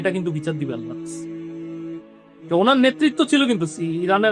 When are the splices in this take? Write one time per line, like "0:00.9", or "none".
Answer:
0:00.8
0:02.5